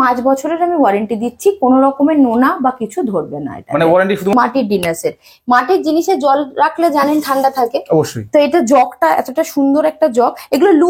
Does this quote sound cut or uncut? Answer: cut